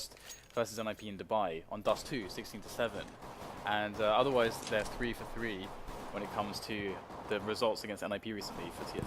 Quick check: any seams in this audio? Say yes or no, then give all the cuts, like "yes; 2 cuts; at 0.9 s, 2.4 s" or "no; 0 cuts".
yes; 1 cut; at 6.3 s